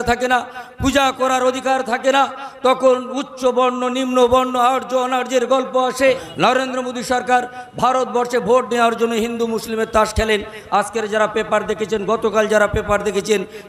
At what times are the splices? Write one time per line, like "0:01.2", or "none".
0:06.3